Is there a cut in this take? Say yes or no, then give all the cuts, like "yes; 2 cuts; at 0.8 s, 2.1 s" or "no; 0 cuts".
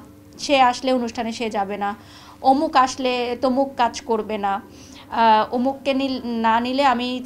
no; 0 cuts